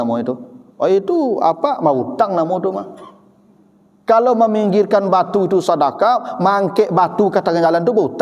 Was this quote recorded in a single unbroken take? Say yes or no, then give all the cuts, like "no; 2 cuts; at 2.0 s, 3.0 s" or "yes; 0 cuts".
yes; 0 cuts